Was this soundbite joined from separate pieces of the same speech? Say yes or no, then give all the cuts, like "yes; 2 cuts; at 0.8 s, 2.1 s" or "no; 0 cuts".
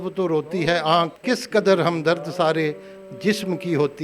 yes; 1 cut; at 1.2 s